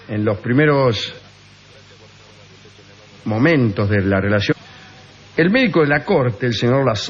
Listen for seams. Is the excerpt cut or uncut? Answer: uncut